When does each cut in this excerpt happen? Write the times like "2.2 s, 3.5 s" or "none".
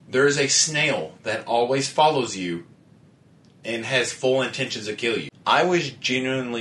5.3 s